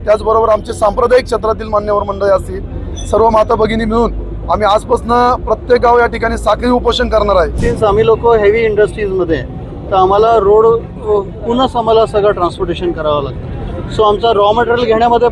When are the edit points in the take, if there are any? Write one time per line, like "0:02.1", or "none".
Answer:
0:07.6